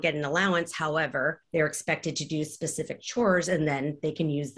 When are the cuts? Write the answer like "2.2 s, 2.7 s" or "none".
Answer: 1.4 s